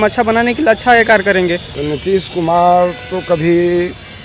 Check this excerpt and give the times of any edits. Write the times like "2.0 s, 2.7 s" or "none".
1.7 s